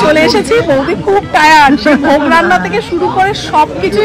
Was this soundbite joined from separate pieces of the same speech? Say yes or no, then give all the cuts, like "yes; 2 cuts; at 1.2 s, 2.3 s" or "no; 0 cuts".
no; 0 cuts